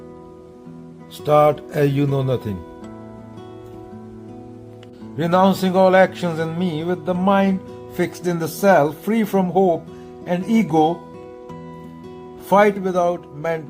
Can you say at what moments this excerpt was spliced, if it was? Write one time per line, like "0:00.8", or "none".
0:01.2
0:02.9
0:05.2